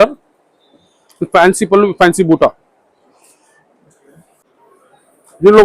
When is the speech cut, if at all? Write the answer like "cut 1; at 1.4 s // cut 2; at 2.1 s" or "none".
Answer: cut 1; at 4.4 s

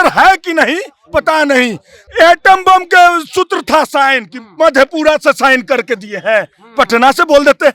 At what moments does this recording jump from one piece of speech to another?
cut 1; at 1.9 s

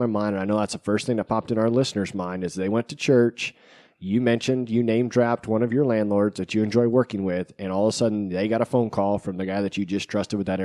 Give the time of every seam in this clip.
none

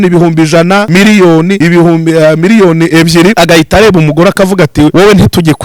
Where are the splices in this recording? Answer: cut 1; at 0.9 s // cut 2; at 1.6 s // cut 3; at 3.3 s // cut 4; at 4.9 s

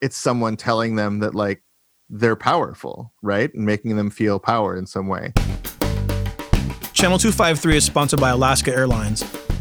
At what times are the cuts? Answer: cut 1; at 5.3 s

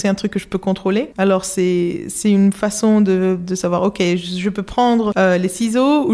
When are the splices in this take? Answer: cut 1; at 1.1 s // cut 2; at 5.1 s

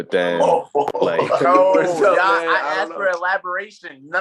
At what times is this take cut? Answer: cut 1; at 1.4 s

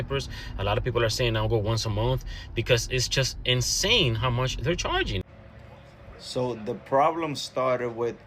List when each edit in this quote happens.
cut 1; at 5.3 s

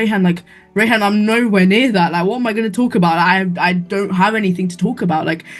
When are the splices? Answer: none

